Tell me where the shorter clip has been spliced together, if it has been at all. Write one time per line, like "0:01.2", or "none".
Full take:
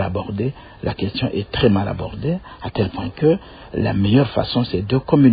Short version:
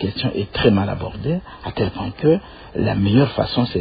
none